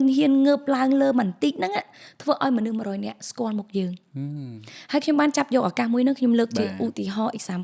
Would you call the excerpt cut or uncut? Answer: uncut